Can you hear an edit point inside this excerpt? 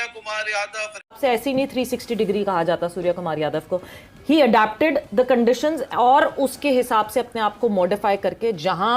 yes; 1 cut; at 1.2 s

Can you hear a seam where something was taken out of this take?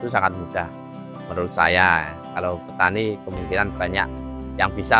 no; 0 cuts

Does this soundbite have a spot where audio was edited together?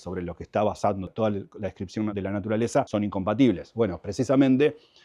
yes; 1 cut; at 2.9 s

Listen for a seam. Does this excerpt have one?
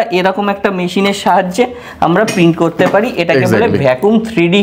no; 0 cuts

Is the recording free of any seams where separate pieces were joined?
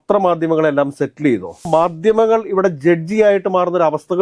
no; 1 cut; at 1.7 s

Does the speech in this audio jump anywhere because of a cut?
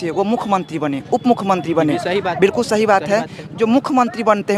no; 0 cuts

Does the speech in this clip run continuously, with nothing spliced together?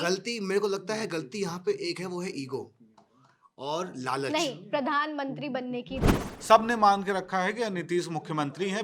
no; 1 cut; at 6.2 s

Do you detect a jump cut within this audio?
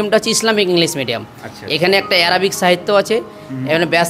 no; 0 cuts

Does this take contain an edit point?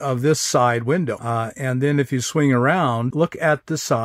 yes; 2 cuts; at 1.2 s, 3.1 s

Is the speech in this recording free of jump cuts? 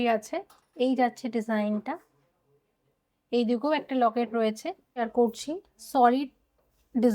no; 1 cut; at 4.9 s

